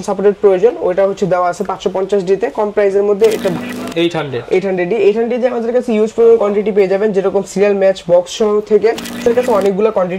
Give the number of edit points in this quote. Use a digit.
2